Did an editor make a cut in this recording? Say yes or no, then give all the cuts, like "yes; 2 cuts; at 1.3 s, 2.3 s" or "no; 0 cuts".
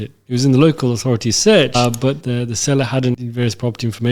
yes; 2 cuts; at 1.8 s, 3.2 s